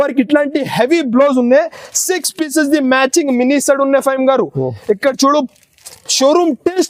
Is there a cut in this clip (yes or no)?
no